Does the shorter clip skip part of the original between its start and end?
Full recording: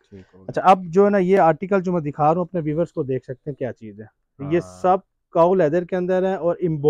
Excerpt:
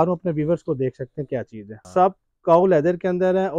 yes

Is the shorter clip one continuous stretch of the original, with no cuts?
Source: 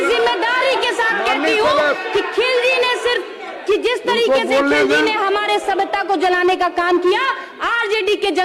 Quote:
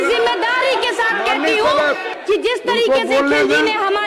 no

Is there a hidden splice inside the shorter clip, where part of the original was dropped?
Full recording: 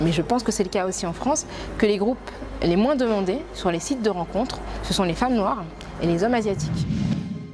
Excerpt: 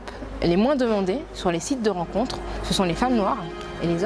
no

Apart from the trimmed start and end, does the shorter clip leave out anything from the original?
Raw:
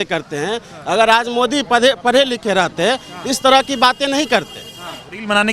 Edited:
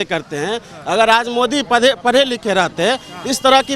no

